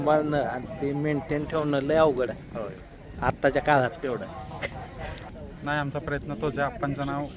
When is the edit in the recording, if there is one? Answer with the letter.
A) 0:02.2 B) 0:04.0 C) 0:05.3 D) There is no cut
C